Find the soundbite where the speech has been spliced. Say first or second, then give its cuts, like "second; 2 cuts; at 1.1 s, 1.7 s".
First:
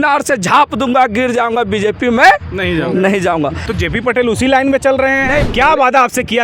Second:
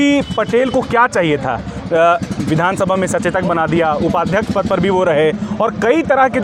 first; 2 cuts; at 3.7 s, 5.4 s